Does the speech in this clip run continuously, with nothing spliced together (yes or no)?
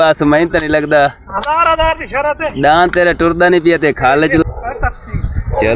no